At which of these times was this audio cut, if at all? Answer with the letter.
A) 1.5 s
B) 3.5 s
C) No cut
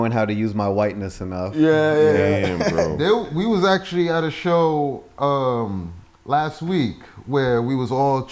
C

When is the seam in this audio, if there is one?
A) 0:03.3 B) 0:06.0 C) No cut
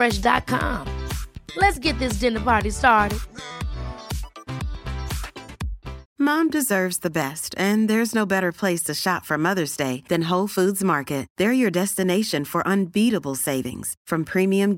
B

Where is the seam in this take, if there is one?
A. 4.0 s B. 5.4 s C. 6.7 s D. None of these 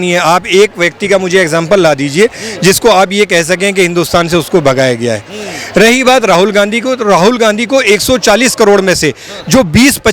D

